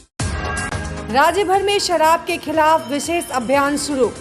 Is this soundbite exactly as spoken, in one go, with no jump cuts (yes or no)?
no